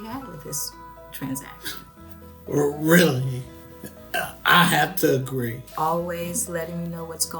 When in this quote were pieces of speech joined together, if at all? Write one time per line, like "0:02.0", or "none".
0:05.6